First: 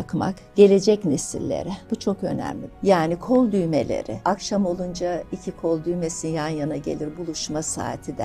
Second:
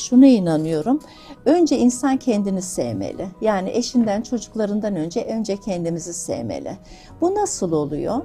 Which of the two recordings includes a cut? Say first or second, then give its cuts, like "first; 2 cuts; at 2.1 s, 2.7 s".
first; 3 cuts; at 1.8 s, 2.7 s, 4.2 s